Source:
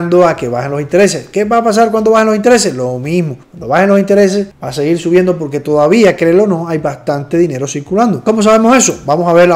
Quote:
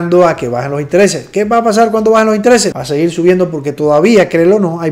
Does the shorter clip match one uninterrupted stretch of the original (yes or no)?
no